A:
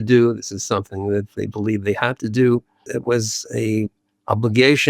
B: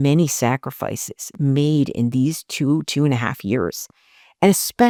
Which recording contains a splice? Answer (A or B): A